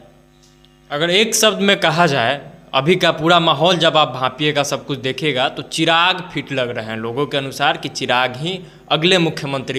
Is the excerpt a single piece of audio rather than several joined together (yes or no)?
yes